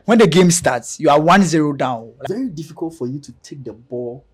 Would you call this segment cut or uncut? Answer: cut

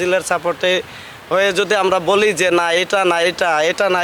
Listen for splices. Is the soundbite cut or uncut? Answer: uncut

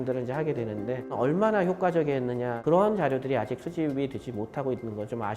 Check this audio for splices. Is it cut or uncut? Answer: cut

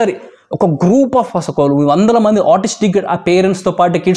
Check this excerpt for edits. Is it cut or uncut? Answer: uncut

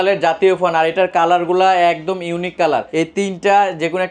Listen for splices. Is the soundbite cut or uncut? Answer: cut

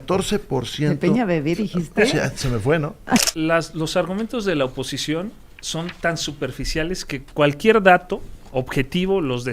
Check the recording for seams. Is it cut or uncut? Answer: cut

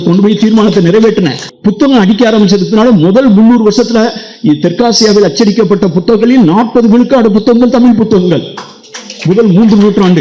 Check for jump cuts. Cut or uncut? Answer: cut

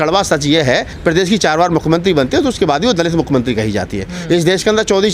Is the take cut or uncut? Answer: cut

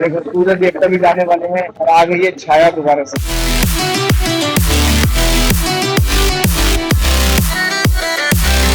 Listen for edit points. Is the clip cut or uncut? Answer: uncut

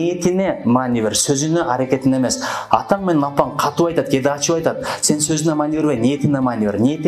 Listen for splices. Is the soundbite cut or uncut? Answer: uncut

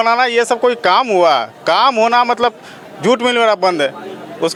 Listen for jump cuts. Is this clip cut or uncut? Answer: uncut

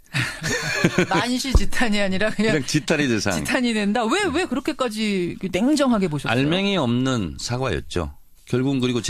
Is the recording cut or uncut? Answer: uncut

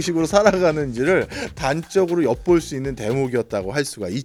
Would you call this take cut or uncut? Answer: uncut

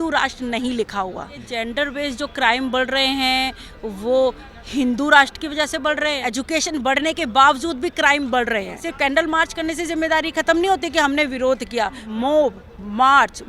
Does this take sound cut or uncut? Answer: cut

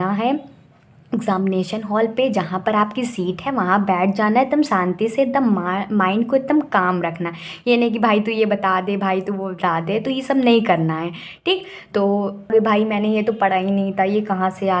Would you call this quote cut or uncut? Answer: cut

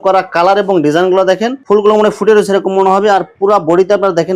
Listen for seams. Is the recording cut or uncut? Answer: uncut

